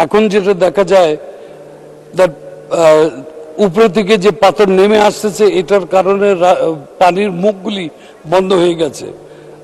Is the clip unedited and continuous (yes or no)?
yes